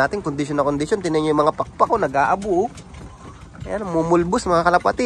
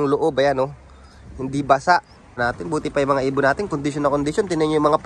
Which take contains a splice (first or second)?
second